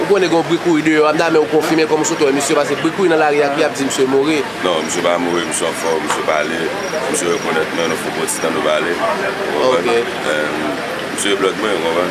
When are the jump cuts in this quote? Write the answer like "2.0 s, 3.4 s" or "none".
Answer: 7.6 s

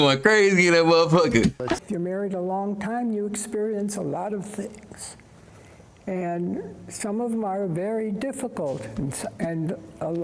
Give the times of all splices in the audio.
1.8 s

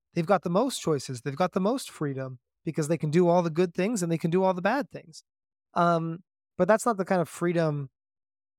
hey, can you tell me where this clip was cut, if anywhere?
none

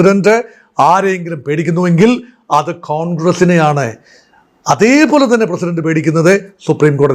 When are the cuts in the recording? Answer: none

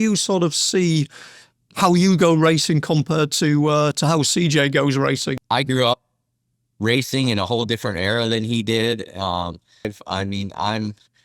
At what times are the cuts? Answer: 5.3 s, 9.9 s

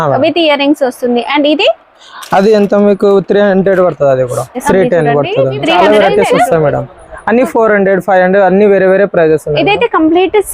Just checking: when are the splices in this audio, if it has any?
4.6 s, 5.8 s

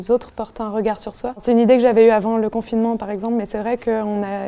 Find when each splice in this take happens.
1.4 s

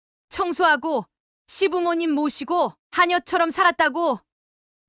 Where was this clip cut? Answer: none

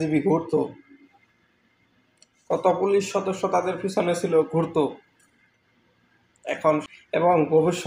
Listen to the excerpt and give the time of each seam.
6.8 s

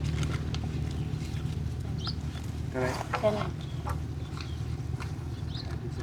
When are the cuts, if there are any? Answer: none

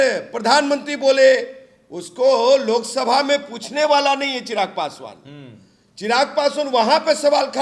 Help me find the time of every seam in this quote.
none

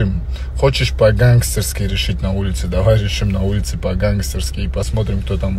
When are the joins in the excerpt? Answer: none

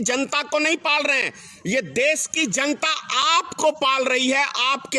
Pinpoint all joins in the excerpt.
none

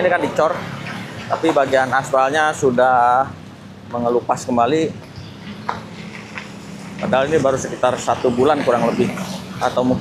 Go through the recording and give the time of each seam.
none

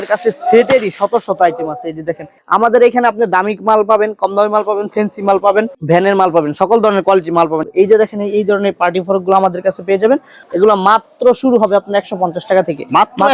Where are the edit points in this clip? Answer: 2.3 s, 7.6 s, 10.4 s

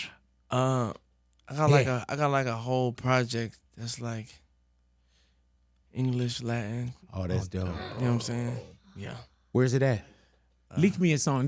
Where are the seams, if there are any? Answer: none

